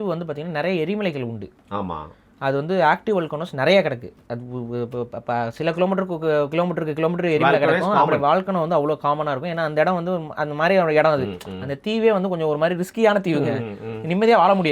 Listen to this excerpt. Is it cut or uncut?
uncut